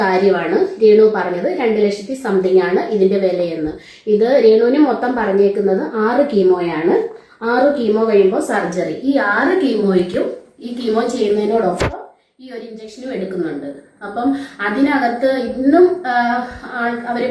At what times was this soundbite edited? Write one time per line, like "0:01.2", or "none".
none

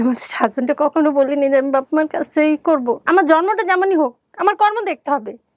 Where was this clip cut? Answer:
0:03.0

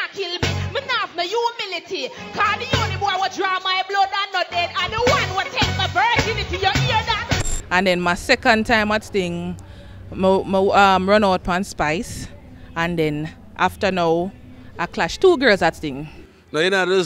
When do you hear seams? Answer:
0:07.4

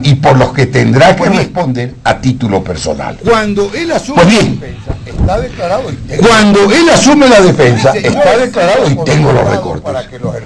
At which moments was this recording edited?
0:02.5

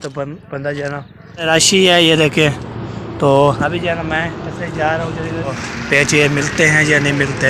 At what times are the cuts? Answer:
0:01.5
0:05.6

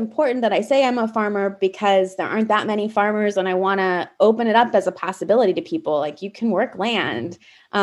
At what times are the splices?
none

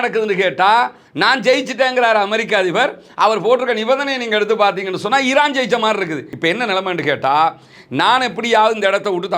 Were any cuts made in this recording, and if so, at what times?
0:06.3

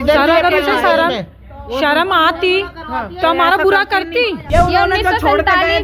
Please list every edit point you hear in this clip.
0:04.4

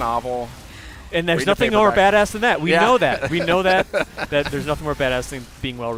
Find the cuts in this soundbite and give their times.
none

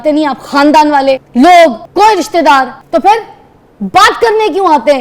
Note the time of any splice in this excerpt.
0:01.2
0:01.8
0:02.8

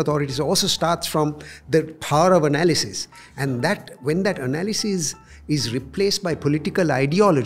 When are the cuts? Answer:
none

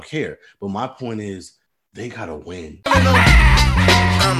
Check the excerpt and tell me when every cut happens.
0:02.7

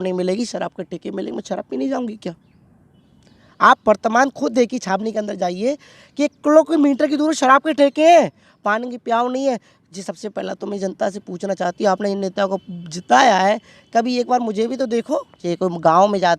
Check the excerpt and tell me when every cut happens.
0:15.4

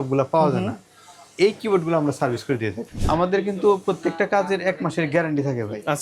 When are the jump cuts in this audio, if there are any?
0:02.9

